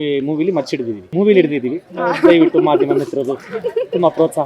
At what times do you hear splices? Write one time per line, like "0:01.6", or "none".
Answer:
0:01.1